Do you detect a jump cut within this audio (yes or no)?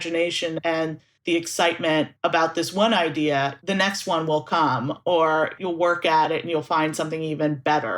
yes